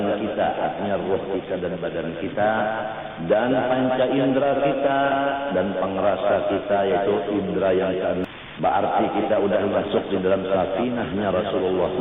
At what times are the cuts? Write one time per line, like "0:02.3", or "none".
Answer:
0:08.2